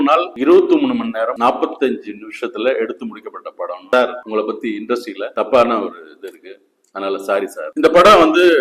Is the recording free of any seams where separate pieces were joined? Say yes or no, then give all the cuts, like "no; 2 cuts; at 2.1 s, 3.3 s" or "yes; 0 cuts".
no; 2 cuts; at 3.8 s, 7.6 s